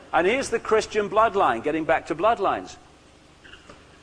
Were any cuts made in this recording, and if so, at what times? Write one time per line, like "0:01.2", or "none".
none